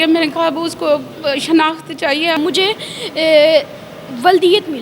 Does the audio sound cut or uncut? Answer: cut